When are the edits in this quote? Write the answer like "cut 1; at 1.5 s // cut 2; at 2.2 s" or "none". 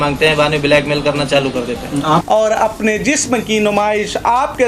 cut 1; at 2.2 s